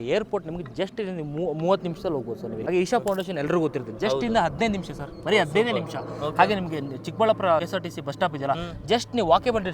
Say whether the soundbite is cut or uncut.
cut